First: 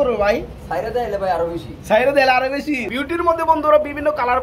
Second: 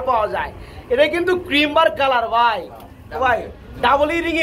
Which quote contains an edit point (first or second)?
first